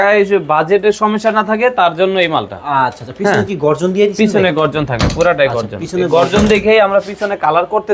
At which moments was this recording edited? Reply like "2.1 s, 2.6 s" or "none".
none